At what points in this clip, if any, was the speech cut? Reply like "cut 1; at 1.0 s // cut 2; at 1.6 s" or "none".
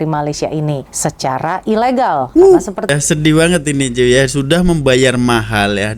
cut 1; at 2.9 s